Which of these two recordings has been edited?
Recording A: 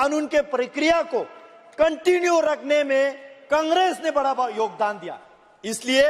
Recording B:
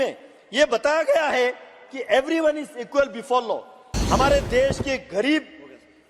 B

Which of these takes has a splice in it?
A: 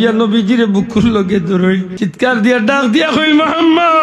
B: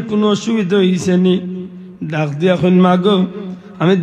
A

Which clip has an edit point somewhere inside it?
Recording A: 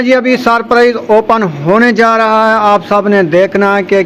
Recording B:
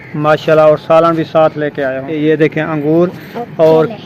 B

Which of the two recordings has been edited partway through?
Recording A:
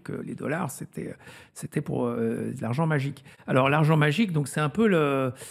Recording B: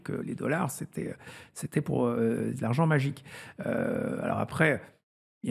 A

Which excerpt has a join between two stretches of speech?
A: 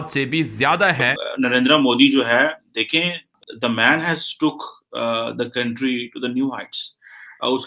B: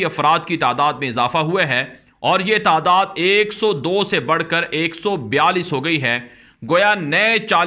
A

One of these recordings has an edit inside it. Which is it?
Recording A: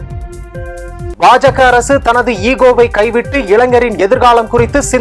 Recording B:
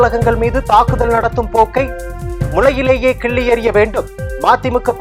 A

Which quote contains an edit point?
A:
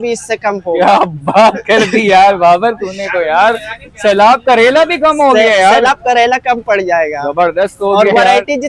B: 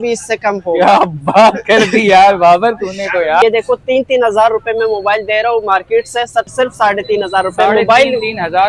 B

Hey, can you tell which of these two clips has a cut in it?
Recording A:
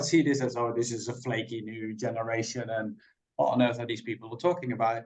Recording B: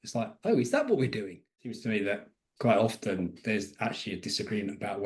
B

